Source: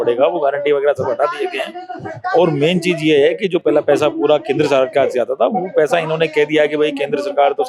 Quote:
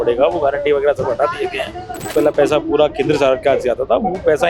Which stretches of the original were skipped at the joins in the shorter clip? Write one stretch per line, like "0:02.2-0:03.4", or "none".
0:02.1-0:03.6